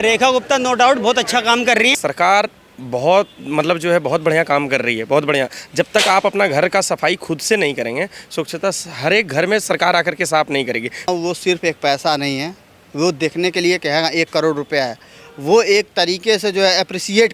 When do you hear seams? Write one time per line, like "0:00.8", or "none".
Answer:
0:02.0
0:11.1